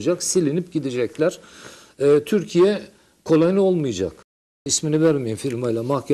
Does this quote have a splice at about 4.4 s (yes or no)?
yes